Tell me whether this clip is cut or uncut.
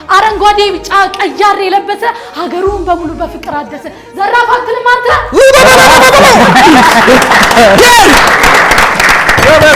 uncut